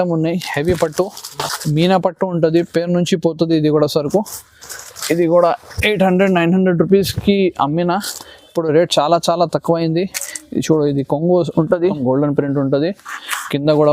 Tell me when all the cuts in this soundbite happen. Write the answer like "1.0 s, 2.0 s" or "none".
12.0 s